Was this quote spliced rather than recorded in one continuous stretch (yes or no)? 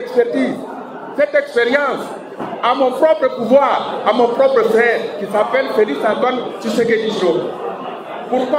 no